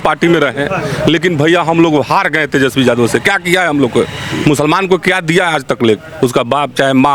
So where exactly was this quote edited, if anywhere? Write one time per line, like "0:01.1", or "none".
none